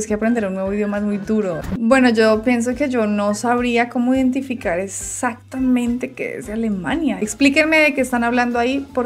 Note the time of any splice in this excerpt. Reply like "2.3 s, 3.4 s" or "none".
1.6 s, 7.2 s